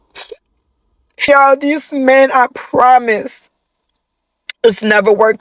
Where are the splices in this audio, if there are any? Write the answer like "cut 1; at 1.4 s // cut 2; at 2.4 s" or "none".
cut 1; at 1.2 s